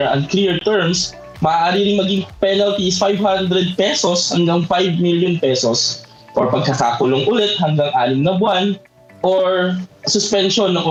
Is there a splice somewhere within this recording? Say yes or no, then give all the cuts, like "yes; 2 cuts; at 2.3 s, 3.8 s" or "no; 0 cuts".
no; 0 cuts